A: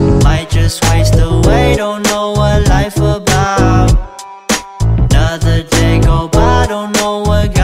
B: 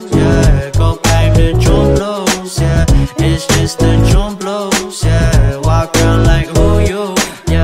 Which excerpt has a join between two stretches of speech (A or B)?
B